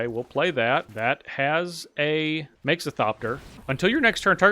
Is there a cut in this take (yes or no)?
yes